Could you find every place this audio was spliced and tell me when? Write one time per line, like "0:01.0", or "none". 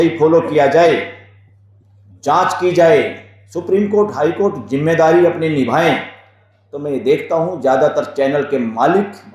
none